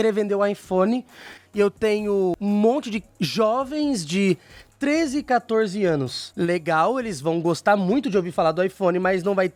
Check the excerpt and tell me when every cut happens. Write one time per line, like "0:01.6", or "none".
none